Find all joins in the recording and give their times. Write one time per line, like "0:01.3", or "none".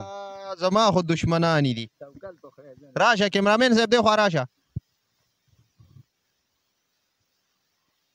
none